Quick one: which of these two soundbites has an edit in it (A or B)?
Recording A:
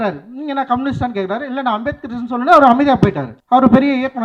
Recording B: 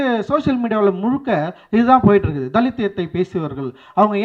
A